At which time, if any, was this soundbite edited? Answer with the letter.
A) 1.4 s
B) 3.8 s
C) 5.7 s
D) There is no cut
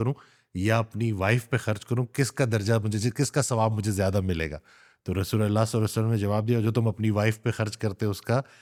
D